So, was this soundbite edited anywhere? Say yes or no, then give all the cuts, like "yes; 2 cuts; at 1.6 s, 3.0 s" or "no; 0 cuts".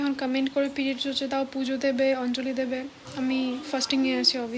no; 0 cuts